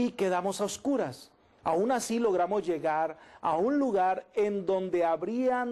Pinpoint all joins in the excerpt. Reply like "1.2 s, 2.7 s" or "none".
1.4 s